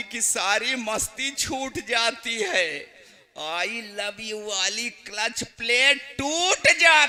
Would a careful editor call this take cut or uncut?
uncut